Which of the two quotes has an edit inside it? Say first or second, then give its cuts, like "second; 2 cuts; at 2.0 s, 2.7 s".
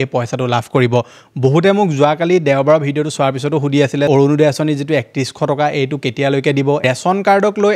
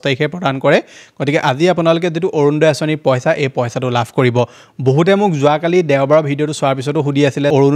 first; 1 cut; at 6.8 s